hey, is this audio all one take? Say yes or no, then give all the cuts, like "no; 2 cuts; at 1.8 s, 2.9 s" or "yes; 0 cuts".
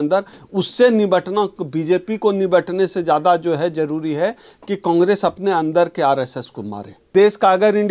no; 1 cut; at 6.9 s